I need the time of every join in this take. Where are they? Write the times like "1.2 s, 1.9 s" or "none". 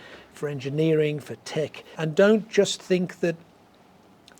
2.0 s